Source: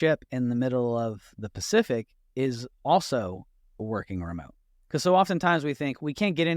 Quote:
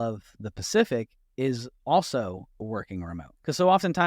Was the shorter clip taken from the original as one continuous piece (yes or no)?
no